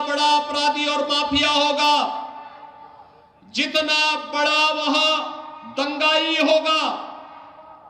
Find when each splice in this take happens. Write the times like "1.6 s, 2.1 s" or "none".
none